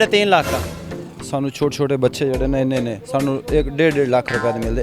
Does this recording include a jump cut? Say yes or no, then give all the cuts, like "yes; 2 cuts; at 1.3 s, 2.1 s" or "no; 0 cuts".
yes; 1 cut; at 1.2 s